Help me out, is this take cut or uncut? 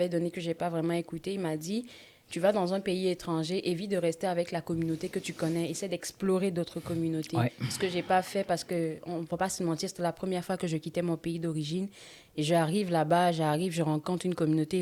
uncut